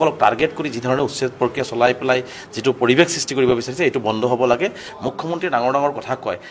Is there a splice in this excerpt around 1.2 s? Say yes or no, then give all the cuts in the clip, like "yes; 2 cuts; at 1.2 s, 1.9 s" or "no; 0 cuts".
no; 1 cut; at 4.8 s